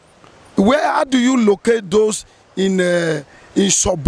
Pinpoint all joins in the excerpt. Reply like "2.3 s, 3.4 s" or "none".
none